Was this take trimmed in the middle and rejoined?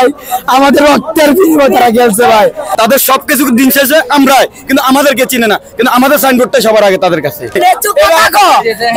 yes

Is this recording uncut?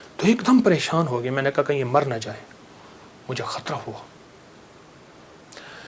yes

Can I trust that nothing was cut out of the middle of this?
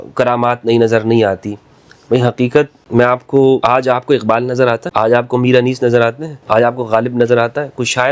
no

